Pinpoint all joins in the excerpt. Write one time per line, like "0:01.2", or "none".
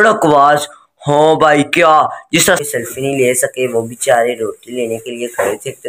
0:02.6